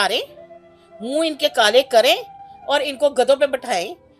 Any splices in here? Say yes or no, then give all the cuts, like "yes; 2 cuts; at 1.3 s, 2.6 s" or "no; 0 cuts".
no; 0 cuts